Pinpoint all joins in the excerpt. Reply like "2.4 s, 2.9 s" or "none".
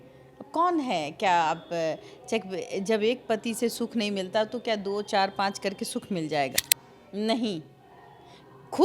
6.5 s

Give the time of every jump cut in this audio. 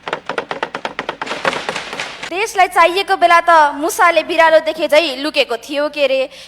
2.1 s

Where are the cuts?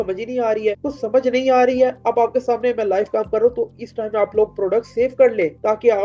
none

